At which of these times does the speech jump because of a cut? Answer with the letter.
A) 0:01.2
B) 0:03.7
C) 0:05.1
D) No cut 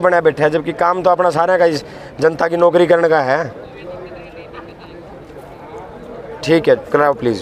D